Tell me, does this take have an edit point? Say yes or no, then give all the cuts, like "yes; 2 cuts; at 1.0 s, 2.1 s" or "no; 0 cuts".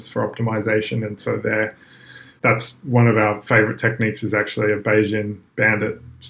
no; 0 cuts